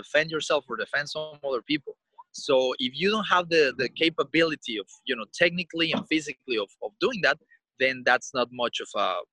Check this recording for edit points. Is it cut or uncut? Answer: uncut